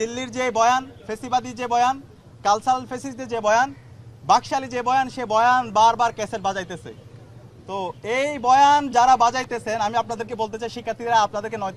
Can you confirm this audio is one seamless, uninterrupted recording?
yes; 0 cuts

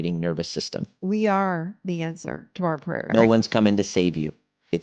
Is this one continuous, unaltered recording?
no; 2 cuts; at 1.0 s, 3.1 s

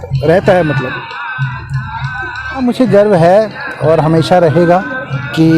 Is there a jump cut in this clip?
yes; 1 cut; at 2.6 s

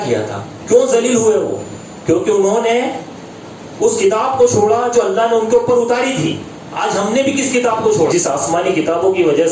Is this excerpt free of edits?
no; 1 cut; at 8.1 s

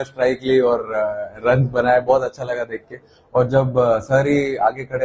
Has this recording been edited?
no; 0 cuts

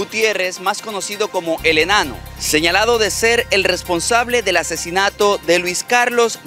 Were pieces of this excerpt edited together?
no; 0 cuts

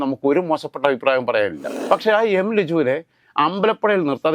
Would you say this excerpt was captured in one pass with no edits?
no; 1 cut; at 1.7 s

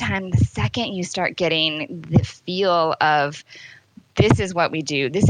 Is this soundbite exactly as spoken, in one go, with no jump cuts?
yes; 0 cuts

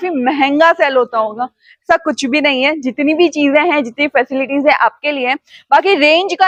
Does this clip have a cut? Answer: no; 0 cuts

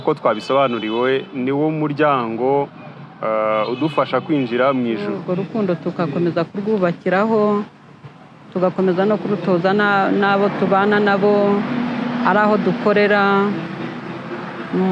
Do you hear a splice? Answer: yes; 1 cut; at 5.1 s

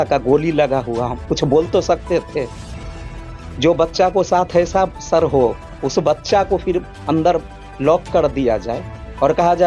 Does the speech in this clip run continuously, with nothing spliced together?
no; 1 cut; at 1.2 s

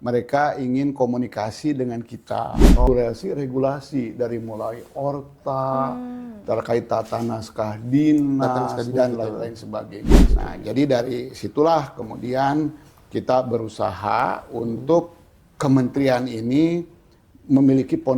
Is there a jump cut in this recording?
yes; 2 cuts; at 2.9 s, 10.2 s

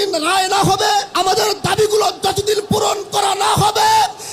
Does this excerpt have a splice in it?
yes; 1 cut; at 1.1 s

